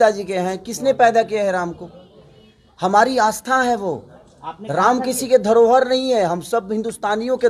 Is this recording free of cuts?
yes; 0 cuts

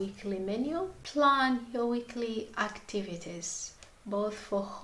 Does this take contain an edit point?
yes; 1 cut; at 1.0 s

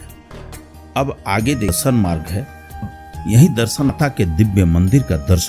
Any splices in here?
yes; 3 cuts; at 1.8 s, 2.9 s, 3.9 s

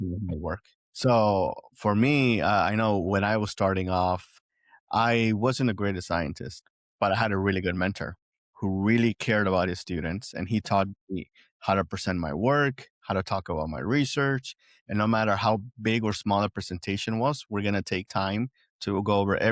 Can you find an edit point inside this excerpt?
no; 0 cuts

